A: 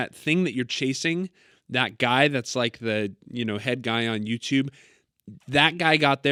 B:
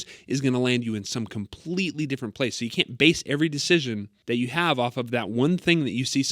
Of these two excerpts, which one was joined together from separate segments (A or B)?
B